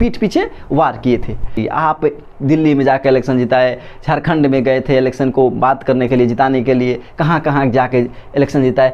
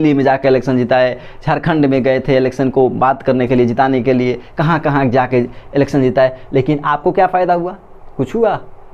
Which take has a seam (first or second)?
first